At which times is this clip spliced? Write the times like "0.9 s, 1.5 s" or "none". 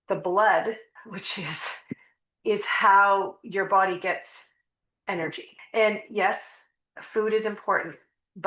0.9 s, 5.5 s